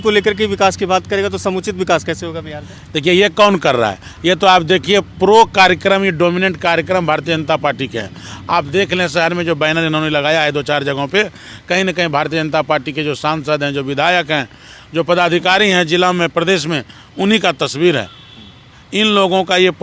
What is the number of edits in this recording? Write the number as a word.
zero